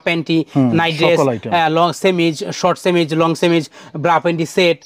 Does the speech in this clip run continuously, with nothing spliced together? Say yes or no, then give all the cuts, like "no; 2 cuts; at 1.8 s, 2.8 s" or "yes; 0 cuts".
yes; 0 cuts